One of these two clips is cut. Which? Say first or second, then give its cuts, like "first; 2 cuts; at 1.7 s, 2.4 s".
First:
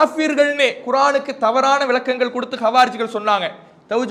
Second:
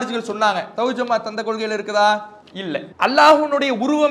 second; 1 cut; at 2.9 s